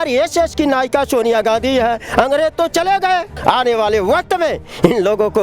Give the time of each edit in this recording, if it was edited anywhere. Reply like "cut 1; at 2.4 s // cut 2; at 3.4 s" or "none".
cut 1; at 3.3 s